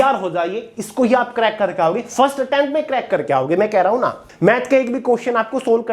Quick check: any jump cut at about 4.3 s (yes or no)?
yes